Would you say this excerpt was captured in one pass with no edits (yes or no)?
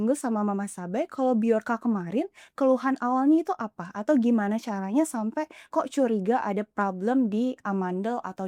yes